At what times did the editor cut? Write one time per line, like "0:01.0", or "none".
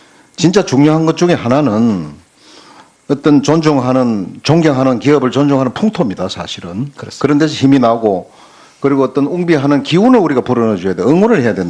none